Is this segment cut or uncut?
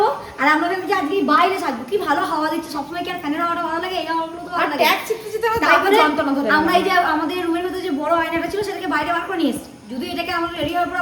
uncut